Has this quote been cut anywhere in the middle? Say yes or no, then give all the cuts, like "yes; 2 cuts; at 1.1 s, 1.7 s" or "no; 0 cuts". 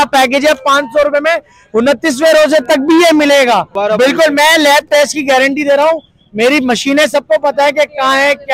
yes; 1 cut; at 3.7 s